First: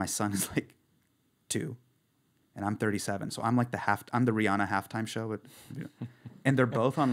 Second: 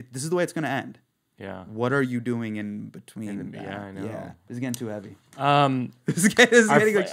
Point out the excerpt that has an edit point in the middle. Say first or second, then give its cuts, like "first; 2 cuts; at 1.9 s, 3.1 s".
second; 1 cut; at 4.5 s